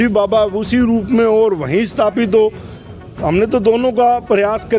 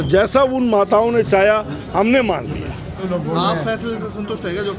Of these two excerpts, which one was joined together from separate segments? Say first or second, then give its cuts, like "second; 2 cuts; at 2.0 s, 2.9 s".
second; 1 cut; at 3.0 s